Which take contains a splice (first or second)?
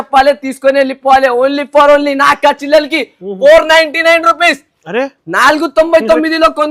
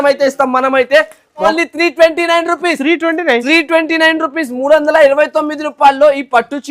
second